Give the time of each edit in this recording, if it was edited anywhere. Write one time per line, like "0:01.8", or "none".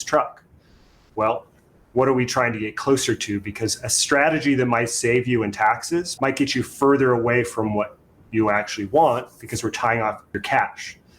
0:06.1
0:10.3

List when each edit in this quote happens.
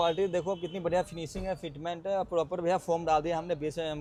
none

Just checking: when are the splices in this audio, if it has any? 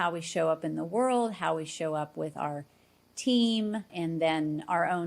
0:03.9

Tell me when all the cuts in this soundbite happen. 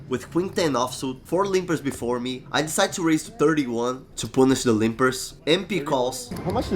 none

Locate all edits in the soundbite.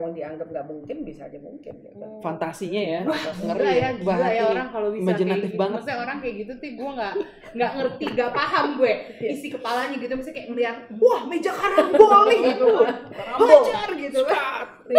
none

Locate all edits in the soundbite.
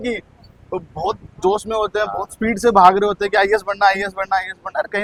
none

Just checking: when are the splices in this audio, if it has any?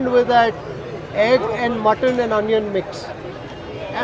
none

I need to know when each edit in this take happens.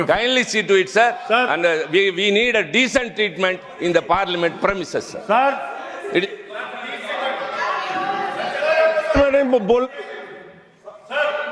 none

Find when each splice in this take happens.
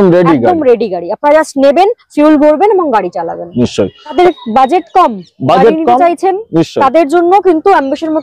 0:04.1

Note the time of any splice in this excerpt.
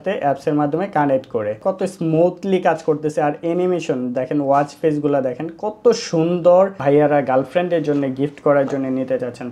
0:01.6
0:06.8

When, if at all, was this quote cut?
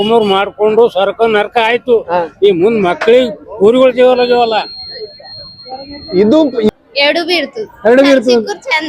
0:05.6
0:06.7

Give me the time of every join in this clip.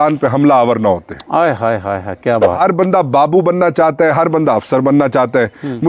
0:02.6

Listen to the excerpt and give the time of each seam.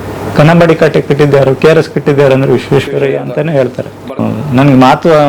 0:04.2

